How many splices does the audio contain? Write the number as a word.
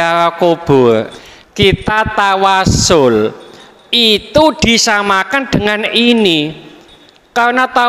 one